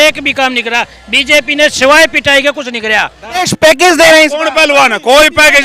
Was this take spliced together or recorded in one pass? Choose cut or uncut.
cut